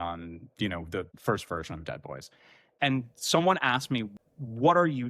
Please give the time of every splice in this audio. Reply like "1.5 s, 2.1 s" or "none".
1.1 s, 2.7 s, 4.1 s